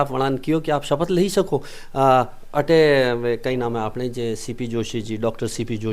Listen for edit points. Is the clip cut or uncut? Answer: uncut